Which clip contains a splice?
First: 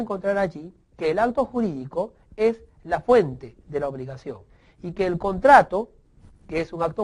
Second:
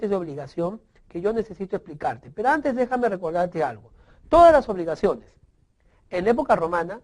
second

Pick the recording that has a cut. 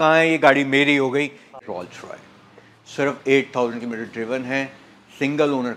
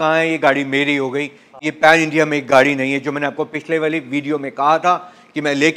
first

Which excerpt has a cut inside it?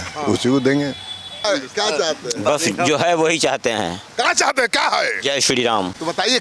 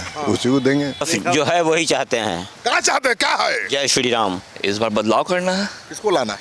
second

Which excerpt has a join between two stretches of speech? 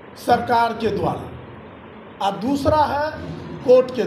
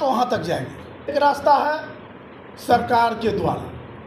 second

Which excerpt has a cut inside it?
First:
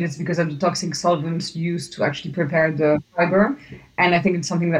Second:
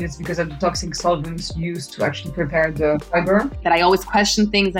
second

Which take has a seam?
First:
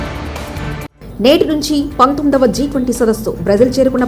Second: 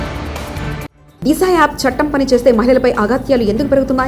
first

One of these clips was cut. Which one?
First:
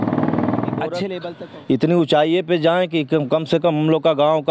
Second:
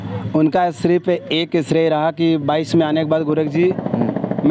first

